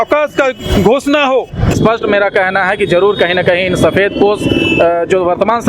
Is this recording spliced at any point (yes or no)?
yes